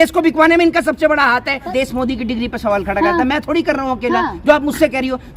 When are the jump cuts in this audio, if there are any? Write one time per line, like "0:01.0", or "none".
0:01.7